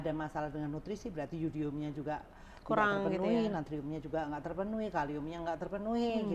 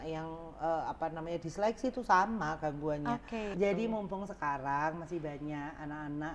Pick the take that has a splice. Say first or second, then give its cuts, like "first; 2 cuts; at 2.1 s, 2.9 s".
second; 1 cut; at 3.5 s